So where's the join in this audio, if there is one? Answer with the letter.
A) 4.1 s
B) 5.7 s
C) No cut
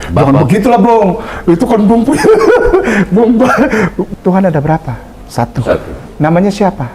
A